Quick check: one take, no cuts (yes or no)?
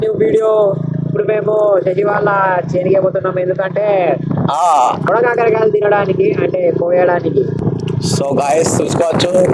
no